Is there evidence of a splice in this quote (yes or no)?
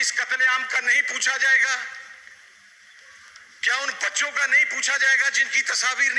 no